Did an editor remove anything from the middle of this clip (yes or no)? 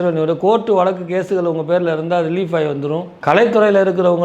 yes